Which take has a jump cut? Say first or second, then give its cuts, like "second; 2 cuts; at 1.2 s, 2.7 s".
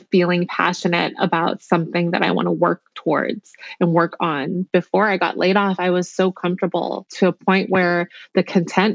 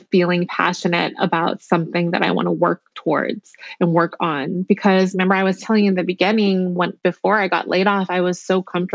first; 2 cuts; at 4.6 s, 7.1 s